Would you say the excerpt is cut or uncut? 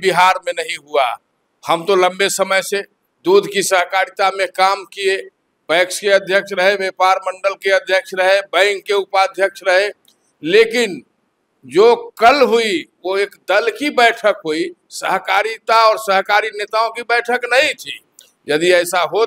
uncut